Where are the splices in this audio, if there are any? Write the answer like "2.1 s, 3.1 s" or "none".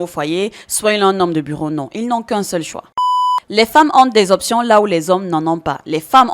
3.0 s